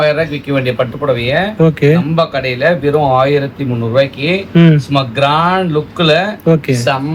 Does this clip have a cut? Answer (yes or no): no